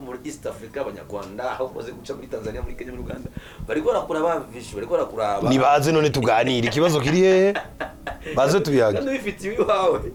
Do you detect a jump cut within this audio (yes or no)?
no